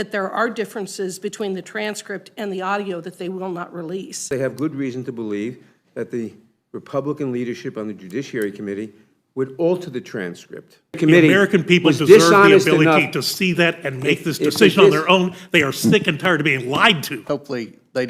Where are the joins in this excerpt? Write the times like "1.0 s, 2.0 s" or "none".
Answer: 4.3 s, 11.0 s, 17.2 s